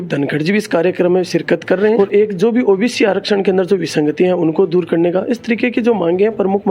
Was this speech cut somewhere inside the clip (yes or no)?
yes